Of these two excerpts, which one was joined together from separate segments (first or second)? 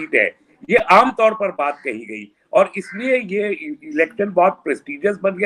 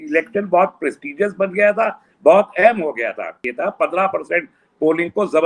second